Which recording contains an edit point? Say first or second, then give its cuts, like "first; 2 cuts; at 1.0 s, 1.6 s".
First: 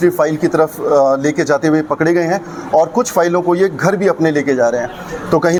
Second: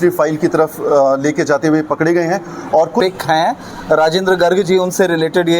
second; 1 cut; at 3.0 s